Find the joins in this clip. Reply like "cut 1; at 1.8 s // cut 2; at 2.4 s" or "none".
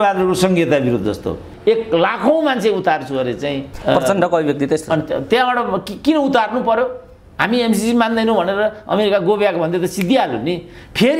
cut 1; at 1.5 s // cut 2; at 3.7 s